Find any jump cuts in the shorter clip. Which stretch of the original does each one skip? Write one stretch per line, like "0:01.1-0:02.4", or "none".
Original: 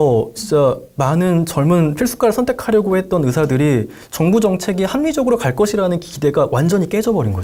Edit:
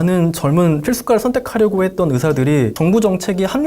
0:03.9-0:04.1